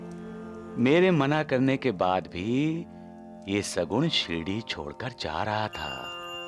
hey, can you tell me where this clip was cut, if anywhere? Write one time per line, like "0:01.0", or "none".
none